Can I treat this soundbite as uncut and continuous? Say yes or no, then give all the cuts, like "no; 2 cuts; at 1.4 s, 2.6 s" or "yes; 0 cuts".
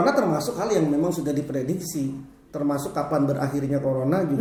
yes; 0 cuts